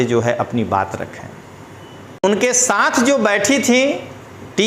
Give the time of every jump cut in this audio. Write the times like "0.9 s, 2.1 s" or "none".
2.4 s